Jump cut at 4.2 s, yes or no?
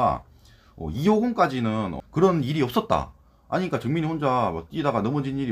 no